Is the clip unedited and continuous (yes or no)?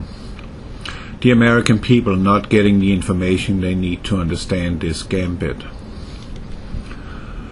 yes